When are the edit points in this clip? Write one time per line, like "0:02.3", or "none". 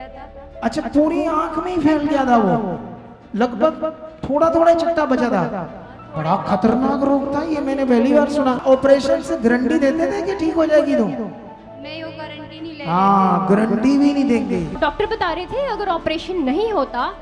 0:08.6
0:14.8